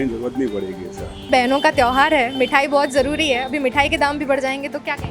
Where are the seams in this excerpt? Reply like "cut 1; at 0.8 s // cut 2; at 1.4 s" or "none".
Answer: cut 1; at 1.3 s